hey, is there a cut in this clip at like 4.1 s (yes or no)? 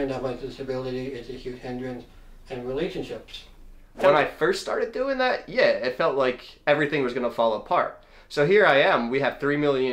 yes